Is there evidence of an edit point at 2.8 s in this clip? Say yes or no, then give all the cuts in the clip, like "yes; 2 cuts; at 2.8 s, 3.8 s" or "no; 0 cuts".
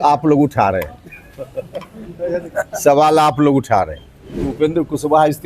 no; 1 cut; at 4.5 s